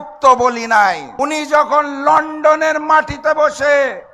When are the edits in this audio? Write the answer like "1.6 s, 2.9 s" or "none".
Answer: 1.1 s